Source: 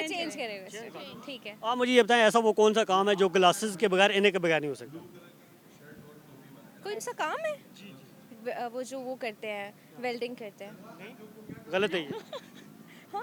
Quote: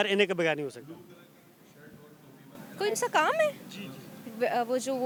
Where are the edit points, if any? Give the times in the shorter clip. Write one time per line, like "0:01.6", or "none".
none